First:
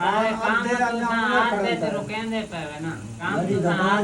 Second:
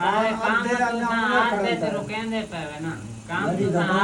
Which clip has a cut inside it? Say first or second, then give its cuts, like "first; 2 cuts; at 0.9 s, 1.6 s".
first; 1 cut; at 3.1 s